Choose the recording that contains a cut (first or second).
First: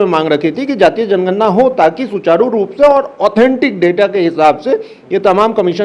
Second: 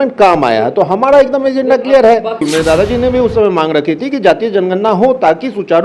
second